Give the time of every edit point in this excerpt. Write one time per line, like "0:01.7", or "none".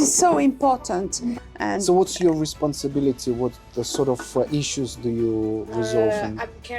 0:01.4